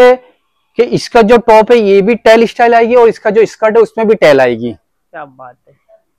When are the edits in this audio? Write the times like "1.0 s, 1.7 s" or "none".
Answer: none